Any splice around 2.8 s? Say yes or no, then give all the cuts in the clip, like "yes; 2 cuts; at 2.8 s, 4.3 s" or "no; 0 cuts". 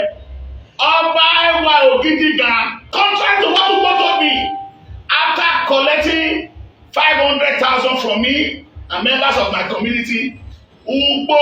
yes; 1 cut; at 2.8 s